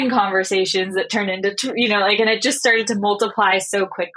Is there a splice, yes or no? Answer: no